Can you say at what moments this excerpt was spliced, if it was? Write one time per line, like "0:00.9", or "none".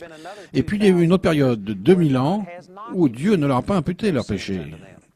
0:03.1